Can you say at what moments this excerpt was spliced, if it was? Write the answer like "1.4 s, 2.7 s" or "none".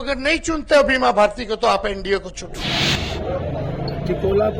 2.8 s